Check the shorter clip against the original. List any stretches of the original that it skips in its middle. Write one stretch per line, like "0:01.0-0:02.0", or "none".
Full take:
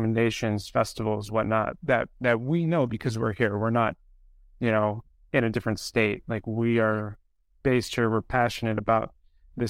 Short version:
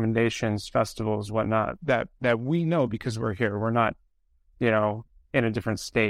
none

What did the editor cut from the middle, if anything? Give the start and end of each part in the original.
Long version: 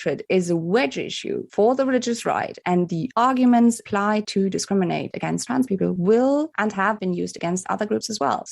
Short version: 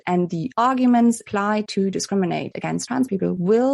none

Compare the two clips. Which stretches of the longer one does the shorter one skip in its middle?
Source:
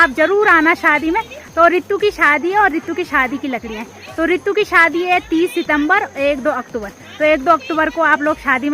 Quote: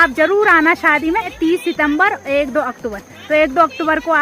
0:01.3-0:05.2

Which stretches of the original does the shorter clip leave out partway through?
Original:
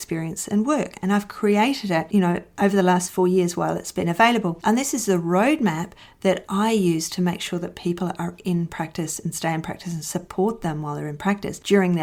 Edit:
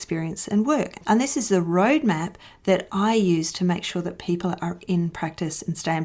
0:01.0-0:04.6

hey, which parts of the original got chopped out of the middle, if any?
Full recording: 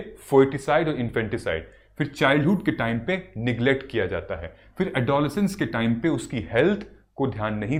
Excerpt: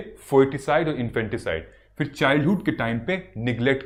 none

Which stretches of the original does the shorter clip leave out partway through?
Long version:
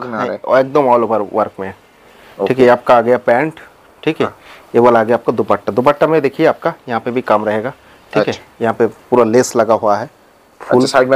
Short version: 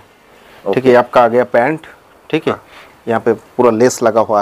0:04.6-0:08.4

